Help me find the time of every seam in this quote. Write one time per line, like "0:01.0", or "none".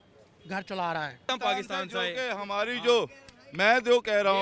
0:01.3